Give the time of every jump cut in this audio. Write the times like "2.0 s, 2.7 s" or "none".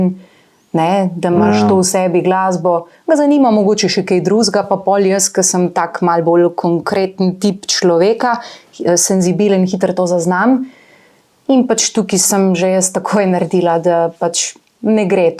none

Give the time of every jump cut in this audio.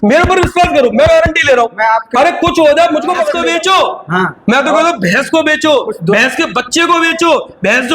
3.4 s

